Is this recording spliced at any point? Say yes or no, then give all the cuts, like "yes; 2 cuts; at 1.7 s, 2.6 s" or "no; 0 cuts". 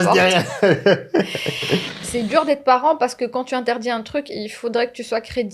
yes; 1 cut; at 2.0 s